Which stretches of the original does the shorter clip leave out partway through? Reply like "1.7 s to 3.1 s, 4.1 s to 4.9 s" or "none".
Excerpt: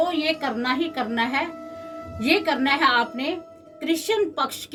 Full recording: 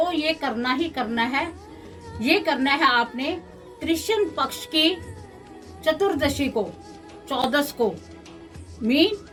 none